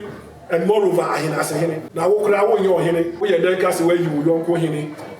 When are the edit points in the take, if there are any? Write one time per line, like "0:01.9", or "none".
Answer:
0:01.9
0:03.2

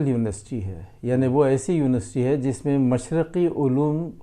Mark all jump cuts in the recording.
none

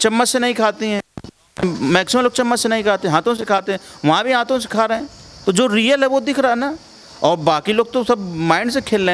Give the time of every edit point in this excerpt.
none

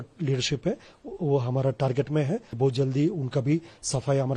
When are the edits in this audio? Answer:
0:02.5

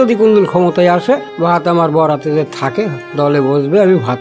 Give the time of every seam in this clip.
0:01.3
0:03.0

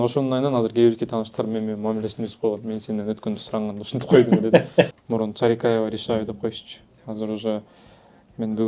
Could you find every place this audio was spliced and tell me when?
0:04.9

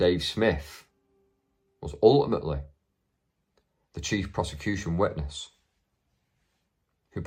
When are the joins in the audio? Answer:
none

